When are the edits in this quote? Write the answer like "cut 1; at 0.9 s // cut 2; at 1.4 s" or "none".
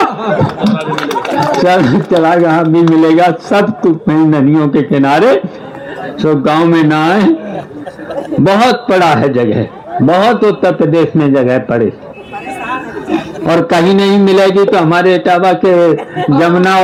none